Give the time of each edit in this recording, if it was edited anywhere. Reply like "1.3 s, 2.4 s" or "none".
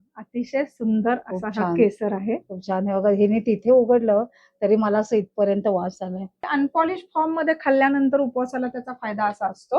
6.5 s